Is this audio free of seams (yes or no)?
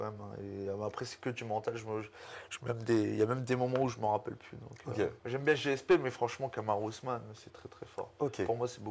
no